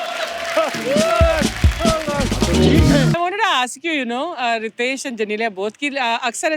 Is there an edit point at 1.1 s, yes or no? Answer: no